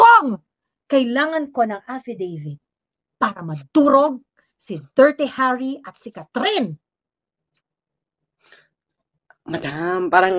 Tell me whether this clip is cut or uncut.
uncut